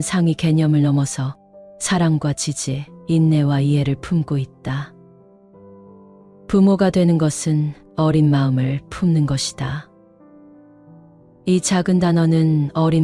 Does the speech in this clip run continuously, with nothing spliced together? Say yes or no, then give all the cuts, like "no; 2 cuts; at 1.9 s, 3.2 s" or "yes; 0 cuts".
yes; 0 cuts